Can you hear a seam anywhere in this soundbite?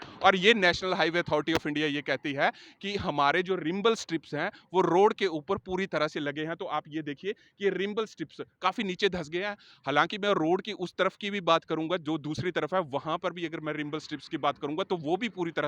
no; 0 cuts

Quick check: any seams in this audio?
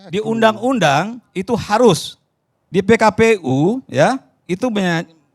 no; 0 cuts

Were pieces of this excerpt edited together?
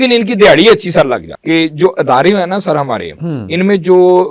yes; 1 cut; at 1.3 s

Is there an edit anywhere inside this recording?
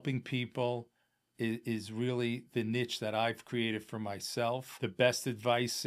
yes; 1 cut; at 4.7 s

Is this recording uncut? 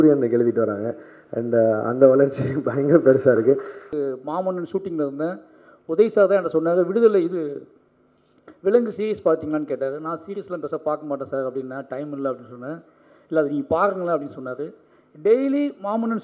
no; 1 cut; at 3.9 s

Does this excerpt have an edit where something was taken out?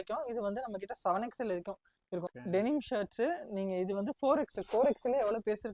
yes; 1 cut; at 2.3 s

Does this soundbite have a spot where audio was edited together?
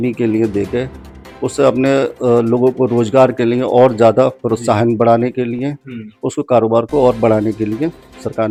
no; 0 cuts

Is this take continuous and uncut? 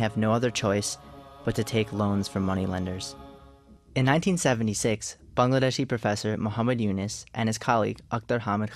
yes; 0 cuts

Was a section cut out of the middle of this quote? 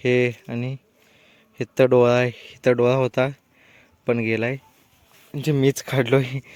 no; 0 cuts

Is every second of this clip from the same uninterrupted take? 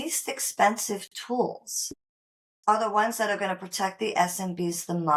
yes; 0 cuts

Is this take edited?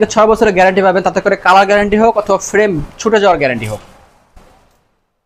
no; 0 cuts

